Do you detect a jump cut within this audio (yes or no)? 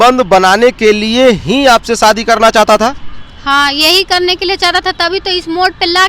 no